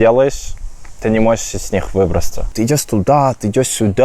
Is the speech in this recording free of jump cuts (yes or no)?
no